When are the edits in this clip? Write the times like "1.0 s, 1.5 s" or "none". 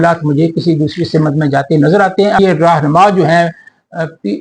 2.4 s